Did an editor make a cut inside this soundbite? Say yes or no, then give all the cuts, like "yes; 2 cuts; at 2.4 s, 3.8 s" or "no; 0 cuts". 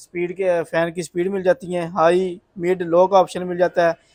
no; 0 cuts